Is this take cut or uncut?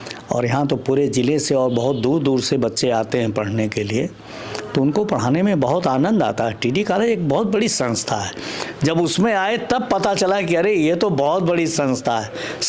uncut